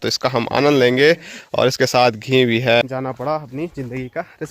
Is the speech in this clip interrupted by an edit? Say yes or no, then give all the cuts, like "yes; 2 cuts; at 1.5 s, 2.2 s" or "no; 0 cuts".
yes; 1 cut; at 2.8 s